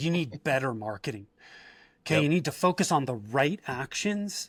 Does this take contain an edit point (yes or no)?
no